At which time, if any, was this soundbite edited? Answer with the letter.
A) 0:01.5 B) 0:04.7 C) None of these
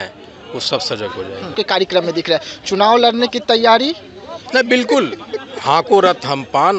A